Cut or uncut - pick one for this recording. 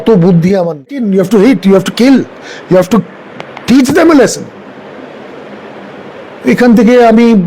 cut